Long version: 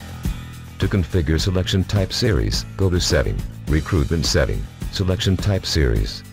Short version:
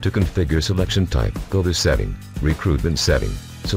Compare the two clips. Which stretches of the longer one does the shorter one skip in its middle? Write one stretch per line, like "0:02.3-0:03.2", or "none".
0:01.9-0:02.4

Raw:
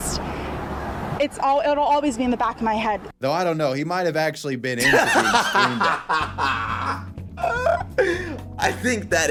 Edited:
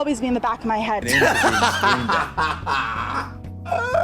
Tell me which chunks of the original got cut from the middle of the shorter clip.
0:03.0-0:04.8

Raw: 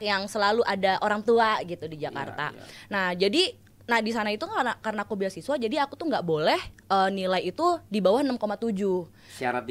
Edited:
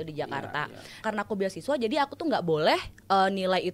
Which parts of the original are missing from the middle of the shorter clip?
0:02.8-0:04.8

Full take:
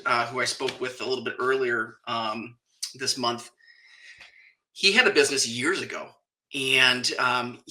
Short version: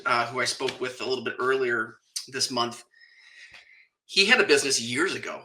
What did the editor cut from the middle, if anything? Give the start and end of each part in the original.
0:02.0-0:02.6

